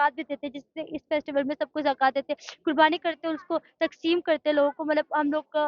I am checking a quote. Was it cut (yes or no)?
no